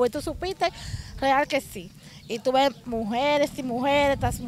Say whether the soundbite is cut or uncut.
uncut